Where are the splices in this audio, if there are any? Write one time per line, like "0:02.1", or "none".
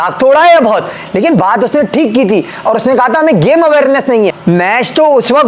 0:01.4
0:04.4

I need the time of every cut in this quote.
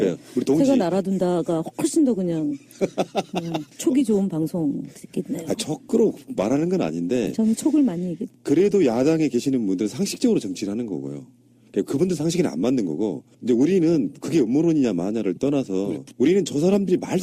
0:05.2

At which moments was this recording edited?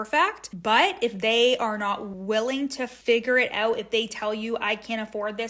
0:02.1
0:02.9

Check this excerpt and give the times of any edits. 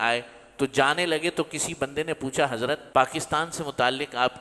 0:02.8

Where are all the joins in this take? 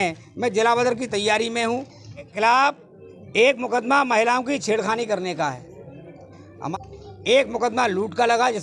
0:02.3
0:06.7

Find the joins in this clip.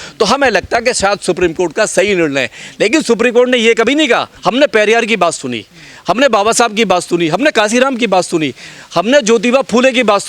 0:04.3

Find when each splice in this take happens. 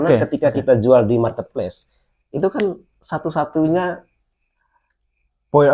none

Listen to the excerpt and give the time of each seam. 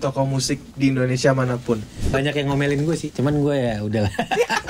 0:02.0
0:03.1

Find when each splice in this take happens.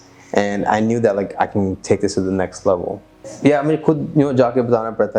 0:03.3

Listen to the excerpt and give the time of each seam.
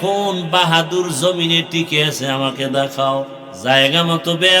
0:03.4

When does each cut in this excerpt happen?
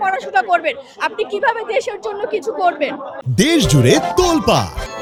none

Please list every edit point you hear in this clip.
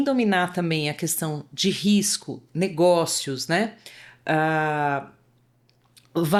none

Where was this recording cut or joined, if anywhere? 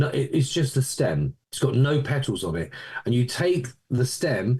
0:01.4

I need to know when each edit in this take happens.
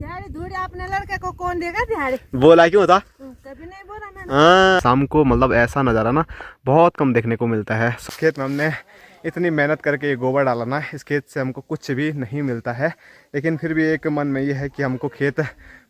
0:04.8
0:08.1

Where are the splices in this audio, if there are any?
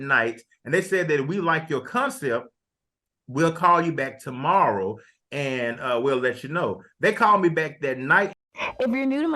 0:08.4

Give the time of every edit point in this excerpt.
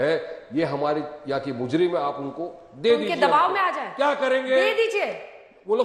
none

